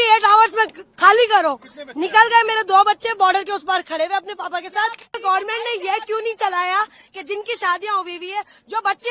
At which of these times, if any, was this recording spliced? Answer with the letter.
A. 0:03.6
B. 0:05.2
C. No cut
B